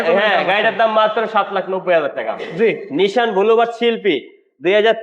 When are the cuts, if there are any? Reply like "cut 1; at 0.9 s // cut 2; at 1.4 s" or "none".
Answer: cut 1; at 2.4 s